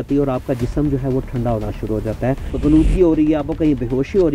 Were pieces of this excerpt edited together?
yes; 1 cut; at 2.5 s

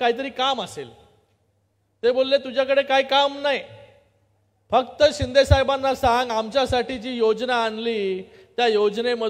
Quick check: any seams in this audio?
no; 0 cuts

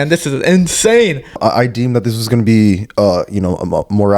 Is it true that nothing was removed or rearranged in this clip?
no; 1 cut; at 1.4 s

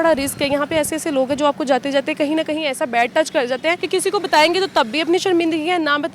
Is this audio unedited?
no; 1 cut; at 3.8 s

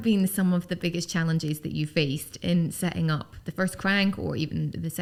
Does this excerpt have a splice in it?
no; 0 cuts

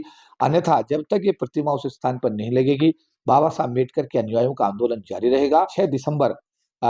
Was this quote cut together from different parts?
yes; 1 cut; at 5.7 s

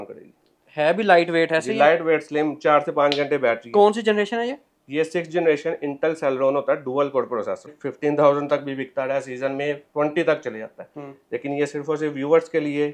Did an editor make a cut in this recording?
yes; 1 cut; at 7.8 s

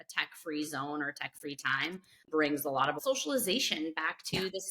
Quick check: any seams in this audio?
yes; 2 cuts; at 2.3 s, 3.0 s

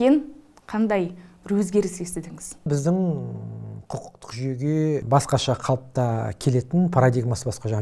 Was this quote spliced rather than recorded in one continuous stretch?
yes; 2 cuts; at 2.7 s, 5.0 s

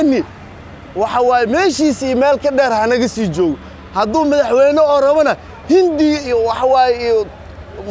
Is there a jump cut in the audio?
no; 0 cuts

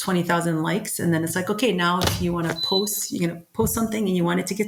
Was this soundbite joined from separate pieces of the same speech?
no; 0 cuts

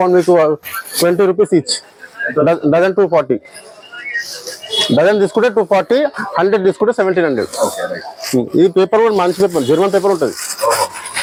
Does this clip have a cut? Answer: no; 0 cuts

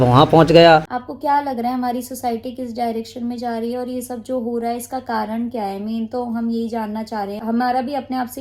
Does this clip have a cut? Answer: yes; 2 cuts; at 0.9 s, 7.4 s

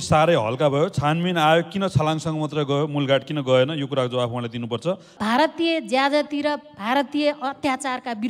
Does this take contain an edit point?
yes; 1 cut; at 5.1 s

